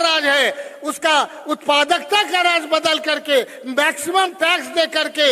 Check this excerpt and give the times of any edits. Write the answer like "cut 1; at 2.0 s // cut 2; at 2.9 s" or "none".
none

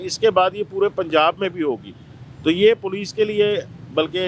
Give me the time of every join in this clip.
none

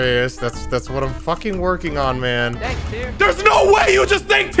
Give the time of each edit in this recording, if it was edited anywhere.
cut 1; at 2.5 s

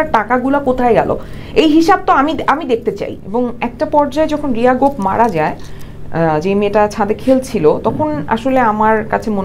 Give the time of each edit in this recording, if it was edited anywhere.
cut 1; at 3.1 s

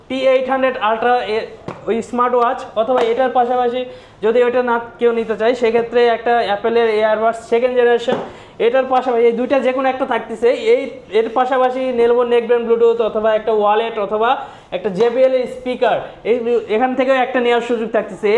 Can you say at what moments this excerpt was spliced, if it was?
none

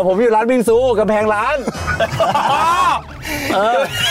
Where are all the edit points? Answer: none

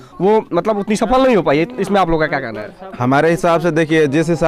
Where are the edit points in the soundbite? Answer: none

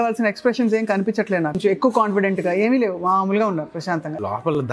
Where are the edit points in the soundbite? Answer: cut 1; at 1.6 s // cut 2; at 3.8 s

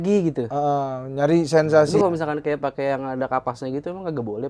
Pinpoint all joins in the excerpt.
cut 1; at 1.9 s

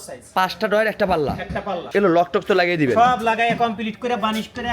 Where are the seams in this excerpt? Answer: none

